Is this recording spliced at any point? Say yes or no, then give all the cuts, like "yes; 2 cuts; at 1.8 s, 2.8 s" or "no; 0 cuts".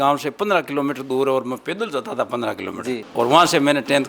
yes; 1 cut; at 3.1 s